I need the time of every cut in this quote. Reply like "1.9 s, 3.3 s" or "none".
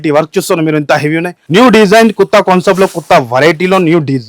1.3 s